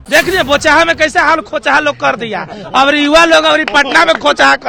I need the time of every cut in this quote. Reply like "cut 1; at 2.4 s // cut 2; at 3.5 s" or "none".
none